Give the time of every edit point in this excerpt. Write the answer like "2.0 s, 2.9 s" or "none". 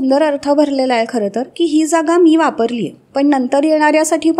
3.0 s

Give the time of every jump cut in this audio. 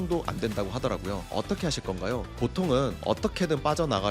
1.2 s

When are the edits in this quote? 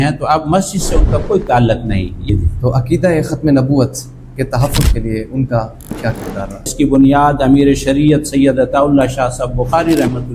2.2 s, 6.7 s

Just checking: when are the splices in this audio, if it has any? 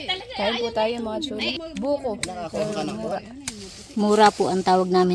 1.4 s

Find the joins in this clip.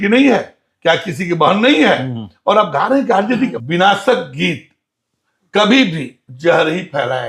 3.6 s

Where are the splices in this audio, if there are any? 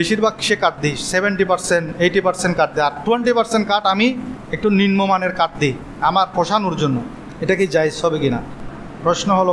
5.9 s, 8.5 s

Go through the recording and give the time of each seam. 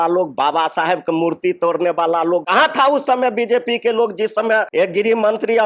2.5 s, 4.7 s

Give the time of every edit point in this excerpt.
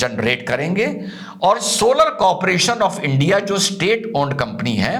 none

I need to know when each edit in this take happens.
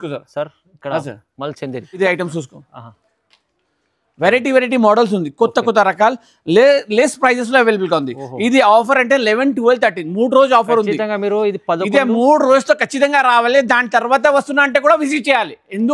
2.0 s

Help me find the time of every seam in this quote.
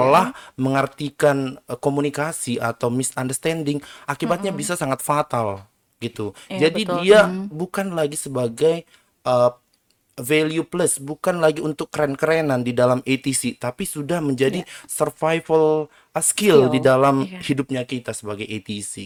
none

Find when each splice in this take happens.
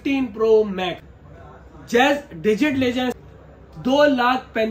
1.1 s, 3.2 s

